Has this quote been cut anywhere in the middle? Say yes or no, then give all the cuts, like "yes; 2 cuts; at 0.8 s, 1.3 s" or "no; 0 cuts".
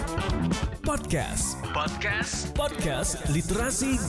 no; 0 cuts